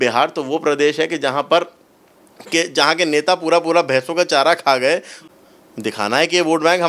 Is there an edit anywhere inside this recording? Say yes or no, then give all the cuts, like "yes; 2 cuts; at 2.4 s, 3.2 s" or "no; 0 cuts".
yes; 1 cut; at 5.2 s